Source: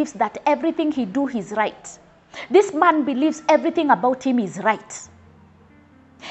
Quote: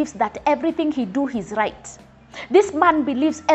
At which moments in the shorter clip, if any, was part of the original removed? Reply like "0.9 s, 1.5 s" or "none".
none

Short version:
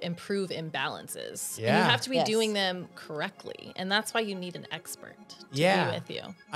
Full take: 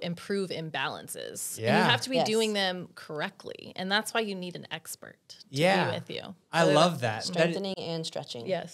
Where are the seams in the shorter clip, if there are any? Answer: none

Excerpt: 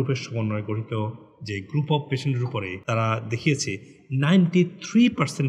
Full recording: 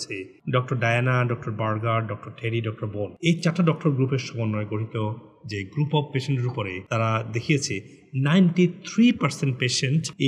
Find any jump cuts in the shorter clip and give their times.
none

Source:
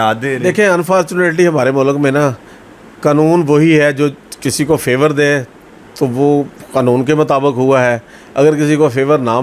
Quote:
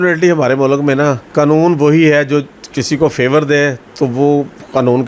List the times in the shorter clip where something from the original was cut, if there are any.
1.2 s, 3.8 s

